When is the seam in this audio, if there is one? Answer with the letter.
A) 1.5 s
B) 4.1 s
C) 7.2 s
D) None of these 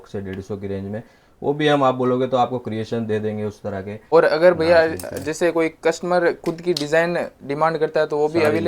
B